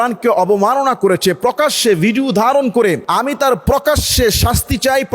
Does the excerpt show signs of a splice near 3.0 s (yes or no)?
yes